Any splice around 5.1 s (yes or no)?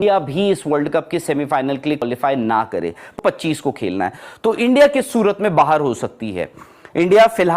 no